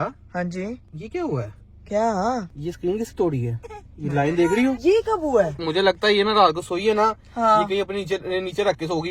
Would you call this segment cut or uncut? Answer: cut